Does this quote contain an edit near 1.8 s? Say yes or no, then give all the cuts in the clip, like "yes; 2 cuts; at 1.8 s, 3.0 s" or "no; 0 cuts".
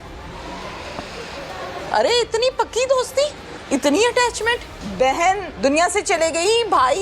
yes; 4 cuts; at 1.8 s, 3.5 s, 4.8 s, 5.5 s